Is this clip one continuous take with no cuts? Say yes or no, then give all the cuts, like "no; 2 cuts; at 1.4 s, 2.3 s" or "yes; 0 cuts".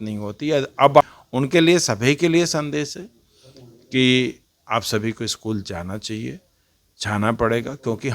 no; 1 cut; at 1.0 s